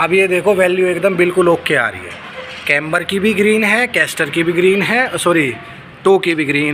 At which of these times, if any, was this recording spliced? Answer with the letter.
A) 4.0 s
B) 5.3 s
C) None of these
C